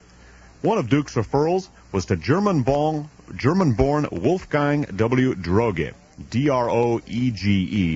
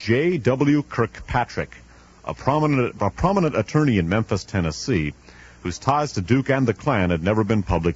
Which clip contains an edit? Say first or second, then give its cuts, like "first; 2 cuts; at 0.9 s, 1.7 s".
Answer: first; 1 cut; at 3.7 s